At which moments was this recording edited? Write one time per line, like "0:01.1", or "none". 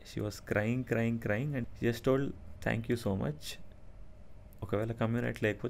0:01.7